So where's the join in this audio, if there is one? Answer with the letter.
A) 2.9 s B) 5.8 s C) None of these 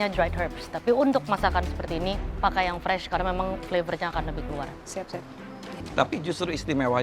B